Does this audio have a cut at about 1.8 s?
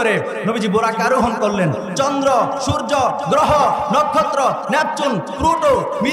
no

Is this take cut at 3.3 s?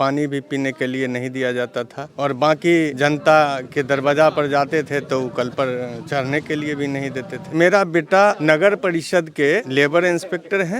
no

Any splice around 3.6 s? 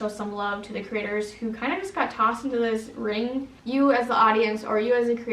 yes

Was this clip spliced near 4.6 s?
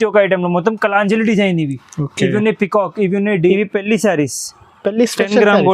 no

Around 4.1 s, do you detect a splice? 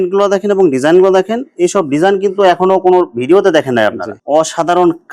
yes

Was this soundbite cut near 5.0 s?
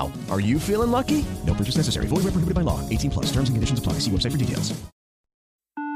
yes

